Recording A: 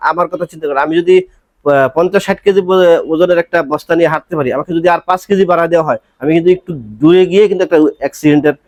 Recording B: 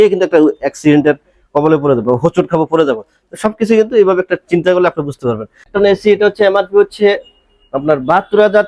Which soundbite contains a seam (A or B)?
B